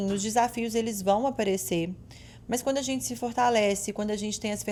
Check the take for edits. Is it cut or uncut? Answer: uncut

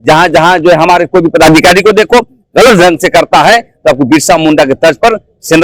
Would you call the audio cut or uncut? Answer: uncut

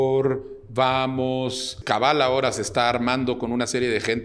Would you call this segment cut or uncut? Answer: cut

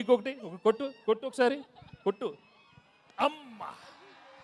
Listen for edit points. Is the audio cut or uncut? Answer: uncut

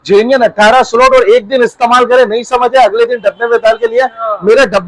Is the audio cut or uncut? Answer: uncut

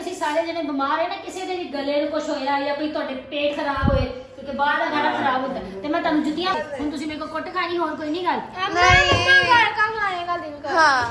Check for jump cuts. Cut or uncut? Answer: cut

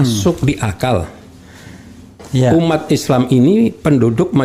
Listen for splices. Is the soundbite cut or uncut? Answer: uncut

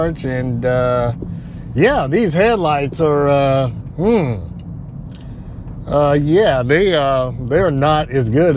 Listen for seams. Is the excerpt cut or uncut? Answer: uncut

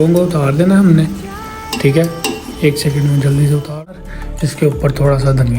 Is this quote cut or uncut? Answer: cut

